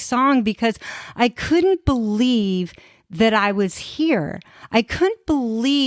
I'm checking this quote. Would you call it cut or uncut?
uncut